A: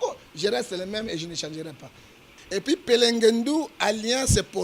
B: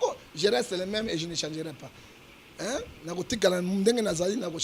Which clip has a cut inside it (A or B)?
A